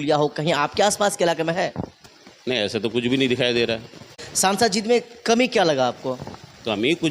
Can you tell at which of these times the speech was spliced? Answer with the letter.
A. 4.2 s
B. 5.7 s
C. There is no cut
A